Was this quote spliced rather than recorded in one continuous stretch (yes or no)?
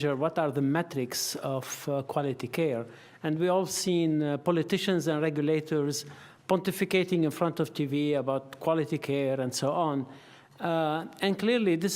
yes